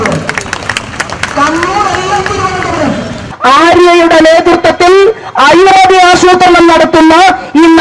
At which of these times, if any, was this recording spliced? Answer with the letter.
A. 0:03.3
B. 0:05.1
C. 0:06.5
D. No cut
A